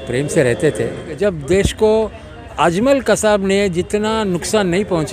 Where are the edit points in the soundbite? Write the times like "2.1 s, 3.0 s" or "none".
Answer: 1.2 s